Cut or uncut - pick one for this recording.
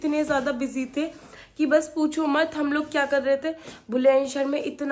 uncut